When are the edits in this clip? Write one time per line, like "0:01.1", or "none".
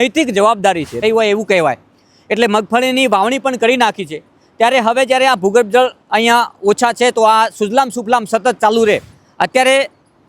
0:01.0
0:09.2